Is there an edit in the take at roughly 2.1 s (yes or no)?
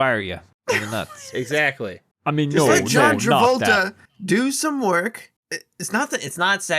yes